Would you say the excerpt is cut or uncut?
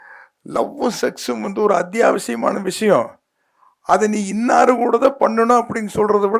uncut